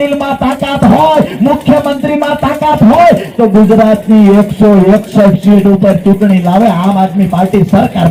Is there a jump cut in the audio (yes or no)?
no